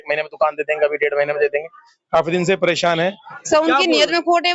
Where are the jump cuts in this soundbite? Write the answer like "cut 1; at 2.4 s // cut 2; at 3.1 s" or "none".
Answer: cut 1; at 3.3 s